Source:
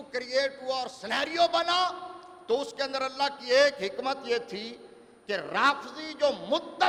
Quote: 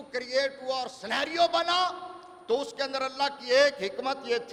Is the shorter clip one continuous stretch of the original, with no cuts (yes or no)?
yes